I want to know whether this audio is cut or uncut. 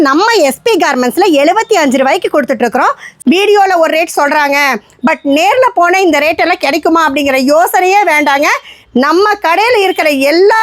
cut